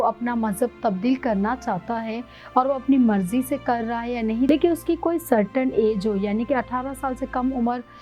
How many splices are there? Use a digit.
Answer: 1